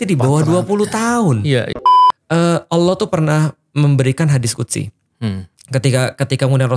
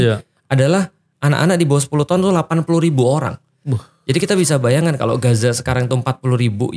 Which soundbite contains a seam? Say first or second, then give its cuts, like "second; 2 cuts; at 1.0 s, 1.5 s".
first; 1 cut; at 1.7 s